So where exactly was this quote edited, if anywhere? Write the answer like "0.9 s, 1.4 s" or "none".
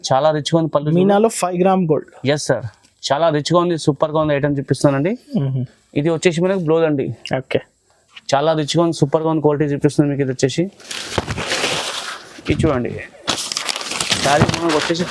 none